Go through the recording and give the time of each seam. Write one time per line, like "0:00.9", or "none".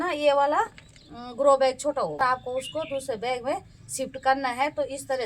0:02.2